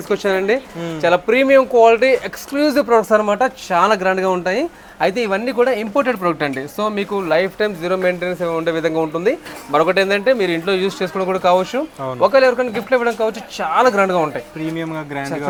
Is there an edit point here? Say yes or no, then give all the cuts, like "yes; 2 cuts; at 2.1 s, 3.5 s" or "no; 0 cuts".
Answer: no; 0 cuts